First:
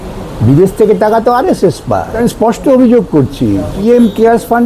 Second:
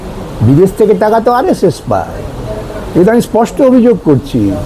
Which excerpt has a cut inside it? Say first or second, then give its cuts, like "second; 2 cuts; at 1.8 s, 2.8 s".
first; 2 cuts; at 2.2 s, 3.8 s